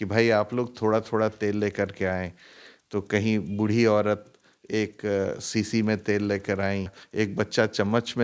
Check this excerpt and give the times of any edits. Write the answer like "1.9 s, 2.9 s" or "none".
7.0 s